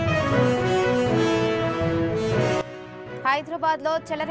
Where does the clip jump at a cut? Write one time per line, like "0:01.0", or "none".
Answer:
0:02.8